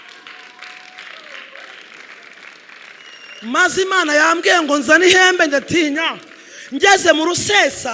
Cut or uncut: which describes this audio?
uncut